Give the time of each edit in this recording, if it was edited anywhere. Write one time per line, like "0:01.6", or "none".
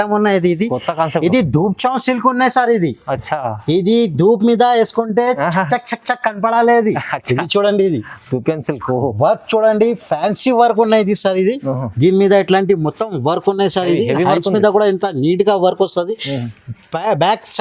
none